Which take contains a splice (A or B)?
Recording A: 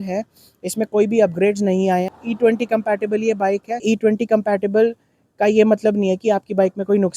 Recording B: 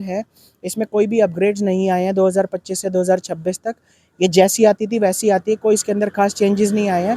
A